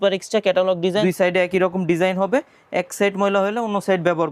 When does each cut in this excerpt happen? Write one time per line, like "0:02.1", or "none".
0:01.0